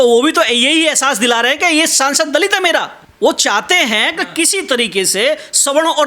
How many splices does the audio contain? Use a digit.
1